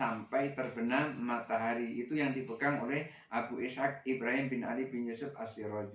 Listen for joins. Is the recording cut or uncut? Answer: uncut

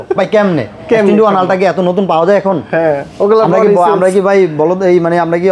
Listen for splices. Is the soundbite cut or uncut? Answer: uncut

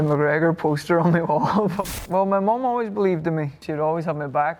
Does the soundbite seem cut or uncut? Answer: cut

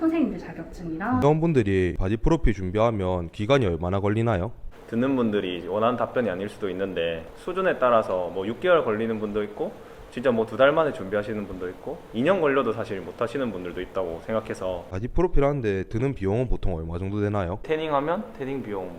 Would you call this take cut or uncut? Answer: cut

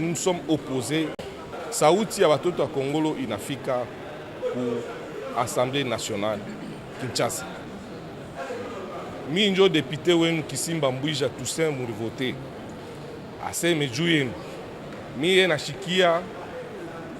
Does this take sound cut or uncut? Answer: cut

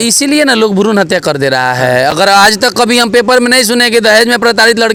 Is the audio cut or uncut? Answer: uncut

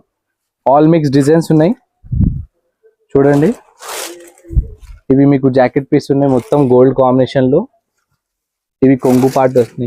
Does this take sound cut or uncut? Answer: uncut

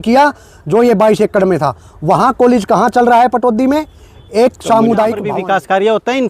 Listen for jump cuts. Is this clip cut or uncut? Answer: cut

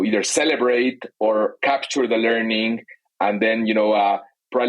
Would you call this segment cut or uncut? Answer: cut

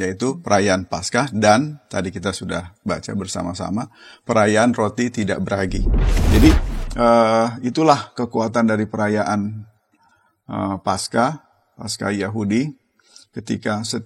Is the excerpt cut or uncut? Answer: cut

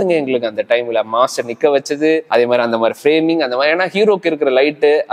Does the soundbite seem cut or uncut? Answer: uncut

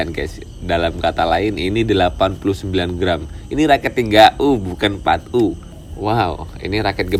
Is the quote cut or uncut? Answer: uncut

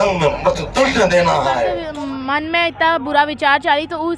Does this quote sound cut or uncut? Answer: cut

